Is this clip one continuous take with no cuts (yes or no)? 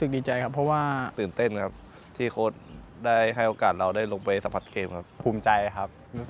no